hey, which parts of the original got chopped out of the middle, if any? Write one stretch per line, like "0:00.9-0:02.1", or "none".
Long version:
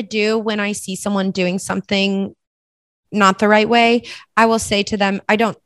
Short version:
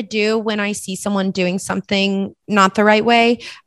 0:02.4-0:03.0